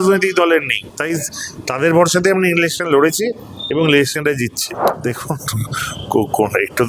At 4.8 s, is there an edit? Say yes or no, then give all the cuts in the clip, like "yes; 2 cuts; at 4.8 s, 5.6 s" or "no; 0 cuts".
yes; 1 cut; at 4.8 s